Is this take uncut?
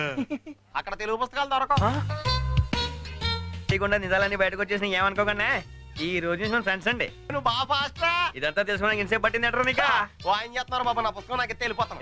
no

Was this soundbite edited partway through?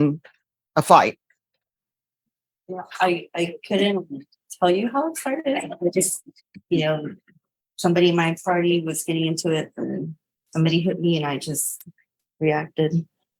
no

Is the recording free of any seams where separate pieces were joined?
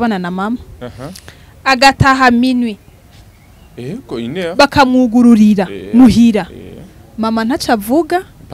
yes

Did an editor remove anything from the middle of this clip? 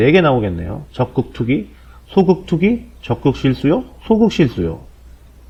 no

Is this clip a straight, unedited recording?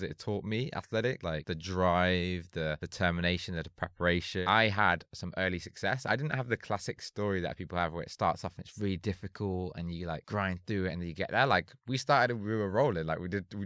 no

